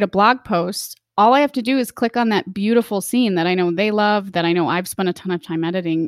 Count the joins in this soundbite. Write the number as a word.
zero